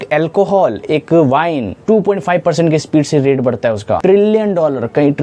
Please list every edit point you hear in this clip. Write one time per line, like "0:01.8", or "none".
0:01.7
0:04.0